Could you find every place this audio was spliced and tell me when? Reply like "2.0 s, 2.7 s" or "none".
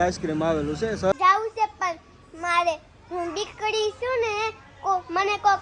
1.1 s

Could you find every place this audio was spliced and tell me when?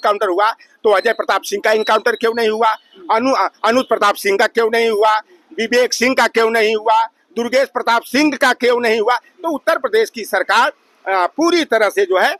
none

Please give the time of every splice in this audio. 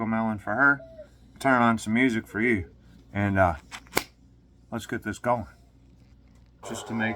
5.9 s

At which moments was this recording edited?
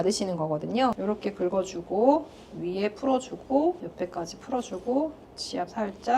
1.0 s, 3.9 s

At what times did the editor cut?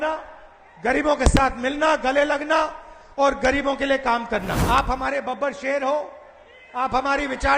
4.6 s

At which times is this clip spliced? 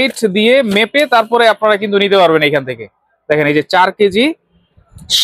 none

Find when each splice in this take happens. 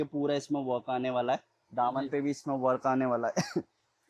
none

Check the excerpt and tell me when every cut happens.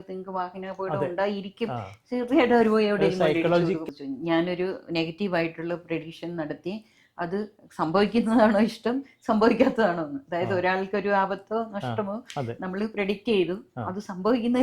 3.8 s

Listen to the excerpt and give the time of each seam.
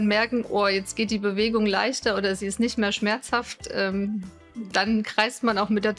none

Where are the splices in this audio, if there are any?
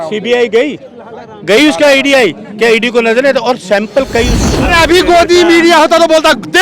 4.4 s

